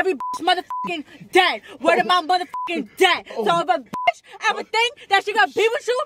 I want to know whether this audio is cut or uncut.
uncut